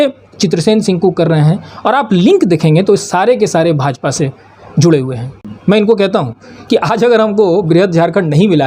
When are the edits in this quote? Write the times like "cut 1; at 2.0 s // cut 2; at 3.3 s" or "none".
cut 1; at 5.3 s